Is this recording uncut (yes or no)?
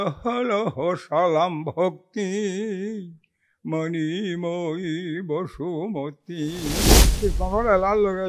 no